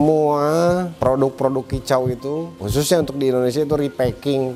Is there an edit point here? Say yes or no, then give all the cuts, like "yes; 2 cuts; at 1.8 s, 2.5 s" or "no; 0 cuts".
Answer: no; 0 cuts